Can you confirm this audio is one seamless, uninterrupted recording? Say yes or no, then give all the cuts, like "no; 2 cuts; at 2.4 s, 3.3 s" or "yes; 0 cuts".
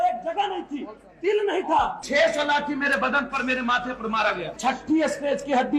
no; 2 cuts; at 2.0 s, 4.6 s